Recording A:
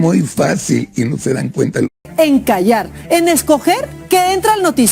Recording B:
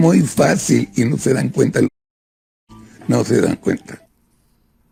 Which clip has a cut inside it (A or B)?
A